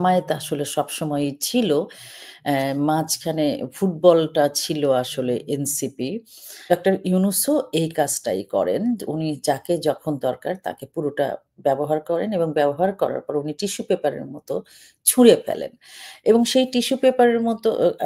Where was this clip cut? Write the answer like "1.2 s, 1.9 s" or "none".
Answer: 6.7 s